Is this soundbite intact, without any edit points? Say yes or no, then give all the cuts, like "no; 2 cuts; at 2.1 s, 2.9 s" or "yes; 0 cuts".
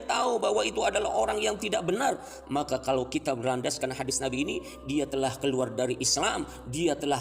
yes; 0 cuts